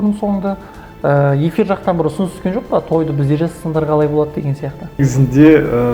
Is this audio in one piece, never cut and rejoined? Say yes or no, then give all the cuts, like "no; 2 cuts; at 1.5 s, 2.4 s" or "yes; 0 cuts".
no; 1 cut; at 5.0 s